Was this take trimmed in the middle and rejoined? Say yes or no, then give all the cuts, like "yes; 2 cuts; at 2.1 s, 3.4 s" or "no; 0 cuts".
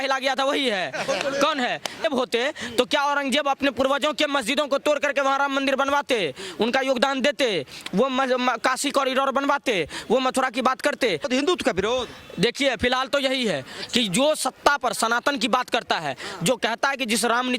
yes; 2 cuts; at 2.0 s, 11.3 s